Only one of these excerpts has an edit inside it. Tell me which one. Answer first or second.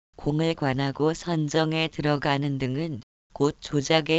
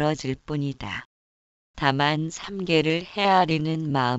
second